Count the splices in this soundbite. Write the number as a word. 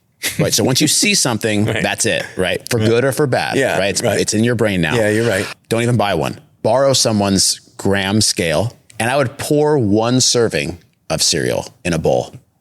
two